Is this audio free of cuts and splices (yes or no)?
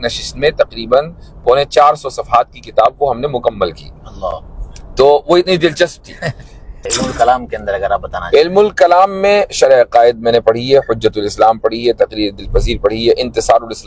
no